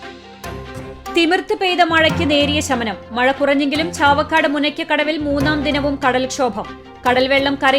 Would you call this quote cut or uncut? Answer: cut